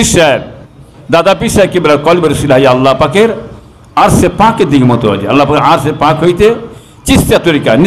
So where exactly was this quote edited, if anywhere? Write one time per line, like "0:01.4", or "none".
none